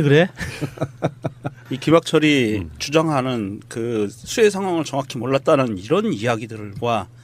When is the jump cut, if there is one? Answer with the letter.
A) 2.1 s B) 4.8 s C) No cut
A